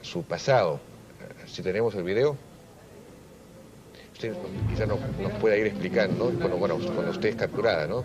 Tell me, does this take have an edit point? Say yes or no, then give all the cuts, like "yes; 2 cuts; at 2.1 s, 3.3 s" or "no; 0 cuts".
yes; 1 cut; at 4.7 s